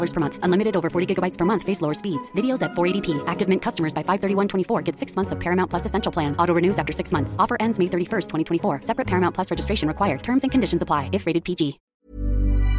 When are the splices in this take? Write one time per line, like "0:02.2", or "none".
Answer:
0:11.8